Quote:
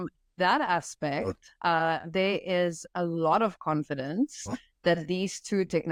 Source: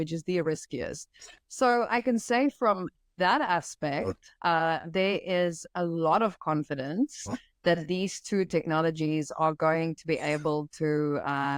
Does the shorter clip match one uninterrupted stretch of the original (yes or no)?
yes